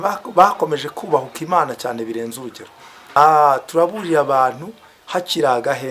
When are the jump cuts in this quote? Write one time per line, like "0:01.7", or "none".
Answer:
0:03.2